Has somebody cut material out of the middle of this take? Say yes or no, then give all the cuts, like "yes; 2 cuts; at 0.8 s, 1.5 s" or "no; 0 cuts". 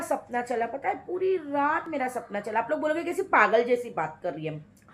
no; 0 cuts